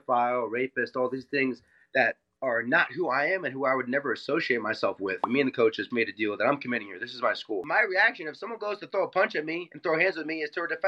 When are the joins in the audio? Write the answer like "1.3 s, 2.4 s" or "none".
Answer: 5.2 s, 7.6 s

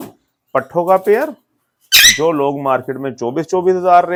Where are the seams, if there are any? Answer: none

